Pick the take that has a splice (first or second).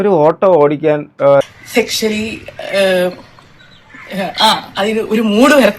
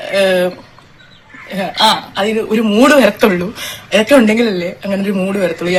first